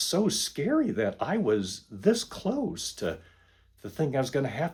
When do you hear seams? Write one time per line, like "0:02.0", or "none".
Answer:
none